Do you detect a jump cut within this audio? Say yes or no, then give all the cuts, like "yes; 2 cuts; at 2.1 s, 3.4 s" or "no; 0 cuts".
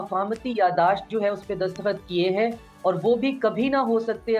no; 0 cuts